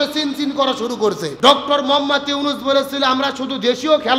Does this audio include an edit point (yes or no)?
yes